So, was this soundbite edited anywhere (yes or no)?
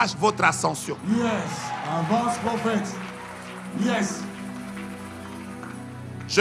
no